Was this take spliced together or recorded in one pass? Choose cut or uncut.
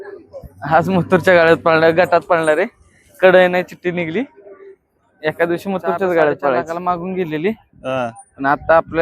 cut